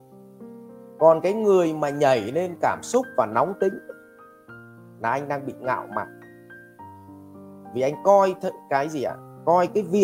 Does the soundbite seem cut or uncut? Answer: cut